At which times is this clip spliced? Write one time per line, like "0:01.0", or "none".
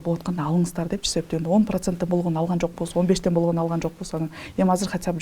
none

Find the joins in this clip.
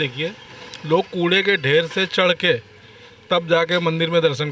none

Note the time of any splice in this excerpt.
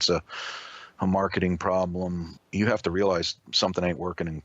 0:02.3

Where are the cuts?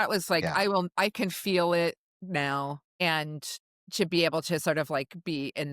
0:02.8

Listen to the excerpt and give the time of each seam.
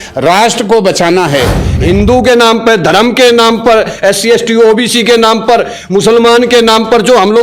0:01.7

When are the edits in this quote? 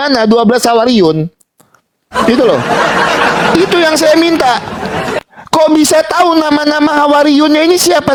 none

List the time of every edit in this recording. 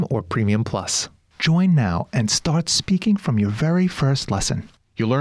0:01.0

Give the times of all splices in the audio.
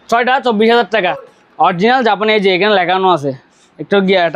0:01.3

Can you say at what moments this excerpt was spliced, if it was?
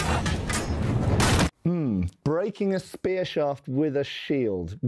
0:01.5

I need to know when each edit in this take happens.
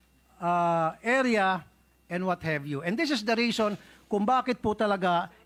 none

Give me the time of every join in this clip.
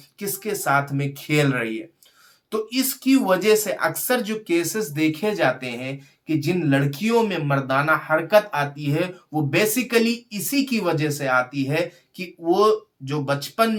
none

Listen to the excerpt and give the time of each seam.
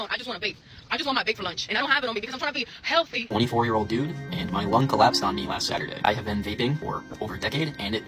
0:01.7
0:03.2
0:06.8

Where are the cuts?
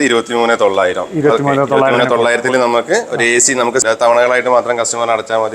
0:03.8

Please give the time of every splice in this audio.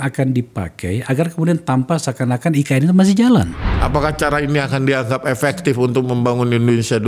0:03.6

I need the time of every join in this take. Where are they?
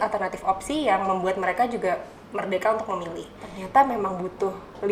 0:03.5

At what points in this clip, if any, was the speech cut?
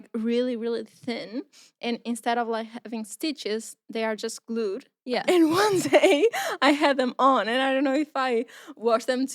0:05.2

